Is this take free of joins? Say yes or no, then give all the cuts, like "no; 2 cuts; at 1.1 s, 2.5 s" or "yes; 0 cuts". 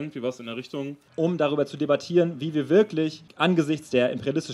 no; 2 cuts; at 1.0 s, 3.2 s